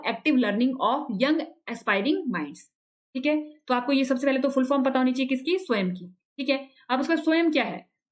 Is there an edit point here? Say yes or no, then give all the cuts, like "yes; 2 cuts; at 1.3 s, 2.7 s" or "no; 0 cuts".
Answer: no; 0 cuts